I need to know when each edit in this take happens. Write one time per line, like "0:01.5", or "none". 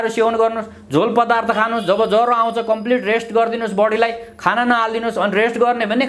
none

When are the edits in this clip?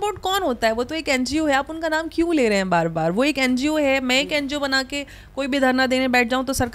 none

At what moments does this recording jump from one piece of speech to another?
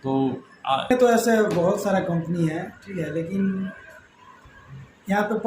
0:00.9

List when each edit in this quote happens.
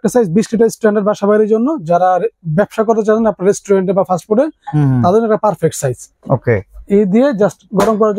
none

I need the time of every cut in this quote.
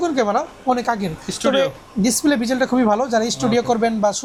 none

